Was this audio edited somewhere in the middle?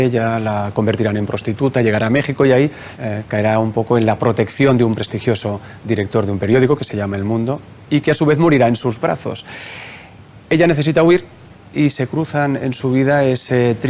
no; 0 cuts

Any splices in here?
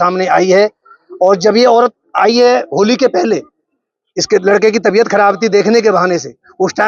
no; 0 cuts

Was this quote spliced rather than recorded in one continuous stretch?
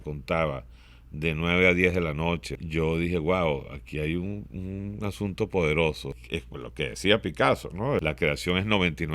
yes; 3 cuts; at 2.5 s, 6.2 s, 8.0 s

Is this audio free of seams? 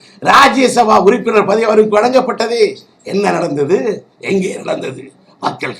yes; 0 cuts

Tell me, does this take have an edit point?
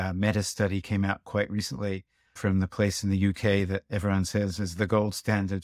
no; 0 cuts

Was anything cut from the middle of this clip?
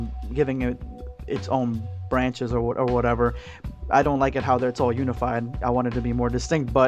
yes; 1 cut; at 5.8 s

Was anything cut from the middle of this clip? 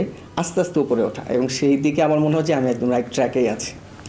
no; 0 cuts

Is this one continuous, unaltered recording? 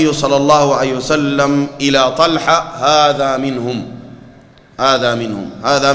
yes; 0 cuts

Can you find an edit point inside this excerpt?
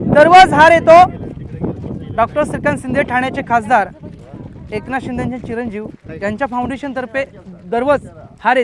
no; 0 cuts

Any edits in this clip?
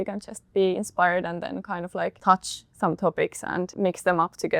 yes; 2 cuts; at 2.2 s, 3.7 s

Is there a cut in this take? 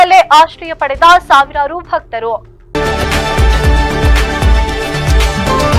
yes; 1 cut; at 2.6 s

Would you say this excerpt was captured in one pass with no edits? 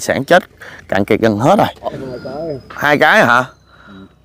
no; 1 cut; at 2.0 s

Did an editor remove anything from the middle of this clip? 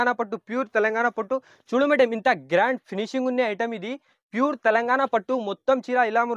no; 0 cuts

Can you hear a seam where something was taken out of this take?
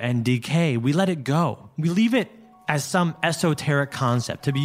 yes; 1 cut; at 1.7 s

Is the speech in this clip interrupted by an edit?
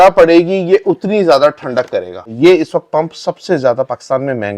yes; 1 cut; at 2.2 s

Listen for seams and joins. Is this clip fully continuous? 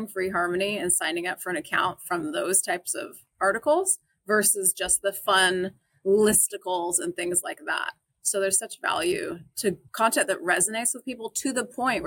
no; 1 cut; at 9.9 s

